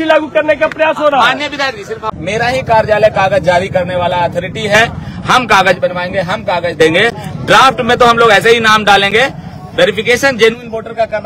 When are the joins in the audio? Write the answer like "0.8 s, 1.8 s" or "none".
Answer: 2.1 s